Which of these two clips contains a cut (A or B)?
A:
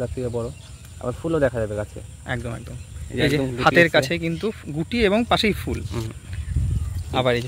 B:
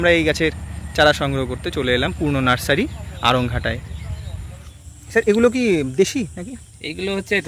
B